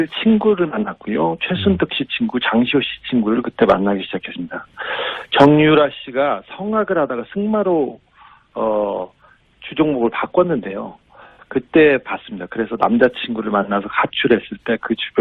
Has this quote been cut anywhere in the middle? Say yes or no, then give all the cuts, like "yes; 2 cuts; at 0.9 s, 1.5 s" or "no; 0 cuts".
yes; 1 cut; at 10.6 s